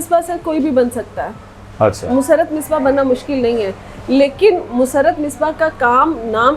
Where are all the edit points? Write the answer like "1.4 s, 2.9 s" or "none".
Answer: none